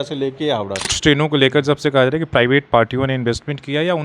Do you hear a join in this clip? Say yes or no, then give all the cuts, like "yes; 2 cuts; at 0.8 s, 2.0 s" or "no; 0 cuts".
yes; 1 cut; at 1.0 s